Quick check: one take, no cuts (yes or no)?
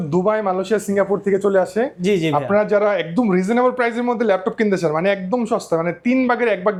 yes